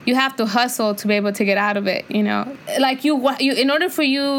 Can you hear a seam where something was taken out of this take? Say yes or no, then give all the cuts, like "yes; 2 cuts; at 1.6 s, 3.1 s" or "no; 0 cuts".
yes; 1 cut; at 2.6 s